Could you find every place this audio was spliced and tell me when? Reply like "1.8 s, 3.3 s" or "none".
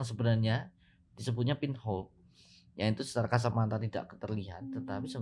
none